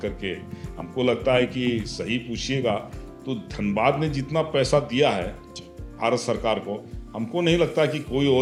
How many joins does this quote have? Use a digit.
0